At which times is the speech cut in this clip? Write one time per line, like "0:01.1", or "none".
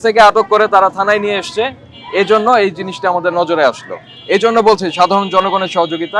none

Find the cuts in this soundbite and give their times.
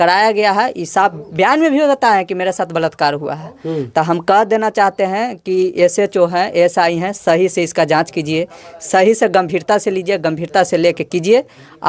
none

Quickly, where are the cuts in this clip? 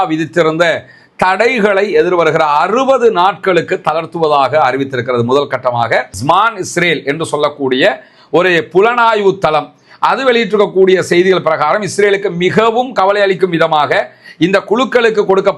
0:06.1

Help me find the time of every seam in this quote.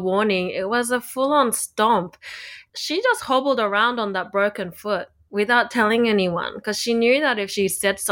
0:02.6

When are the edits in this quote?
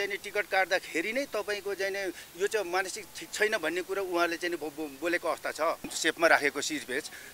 0:05.9

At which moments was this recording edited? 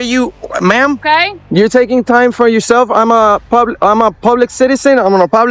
0:01.0

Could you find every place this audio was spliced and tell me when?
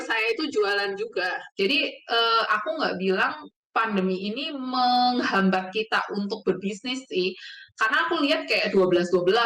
0:01.4

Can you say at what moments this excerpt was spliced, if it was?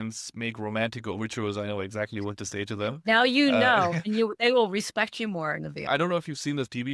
none

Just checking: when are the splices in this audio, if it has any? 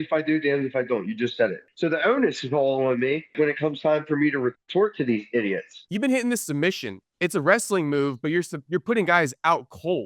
0:01.7
0:03.3
0:05.9
0:07.0

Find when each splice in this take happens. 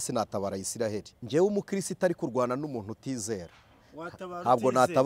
0:01.1

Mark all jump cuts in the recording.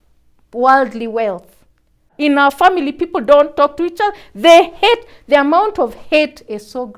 0:02.1

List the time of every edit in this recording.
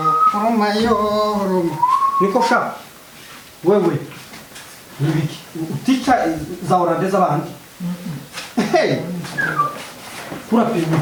none

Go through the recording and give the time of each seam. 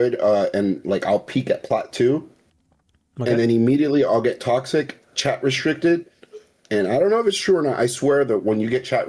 none

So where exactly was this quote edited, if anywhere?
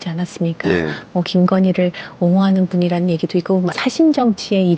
0:03.8

